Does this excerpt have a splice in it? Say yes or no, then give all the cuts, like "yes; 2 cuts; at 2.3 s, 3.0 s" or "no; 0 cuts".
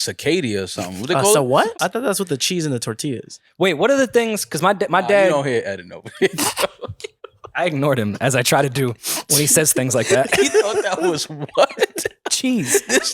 yes; 1 cut; at 1.8 s